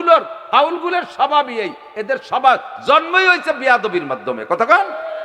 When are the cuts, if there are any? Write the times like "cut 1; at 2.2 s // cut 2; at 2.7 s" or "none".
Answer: none

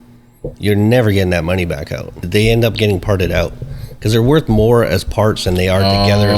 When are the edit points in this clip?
cut 1; at 2.1 s

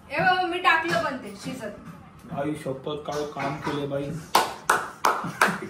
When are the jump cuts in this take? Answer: none

